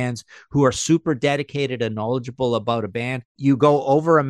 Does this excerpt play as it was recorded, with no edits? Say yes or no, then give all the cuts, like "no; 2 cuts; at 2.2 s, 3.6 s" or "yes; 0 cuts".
no; 1 cut; at 3.4 s